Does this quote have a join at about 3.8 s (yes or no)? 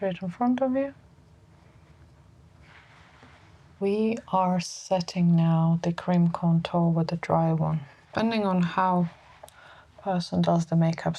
yes